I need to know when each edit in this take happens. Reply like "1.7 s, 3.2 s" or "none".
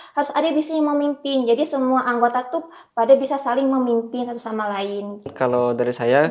5.3 s